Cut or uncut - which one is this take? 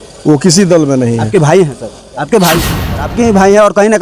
cut